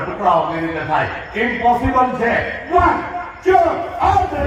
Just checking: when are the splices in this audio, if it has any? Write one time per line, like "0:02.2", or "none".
none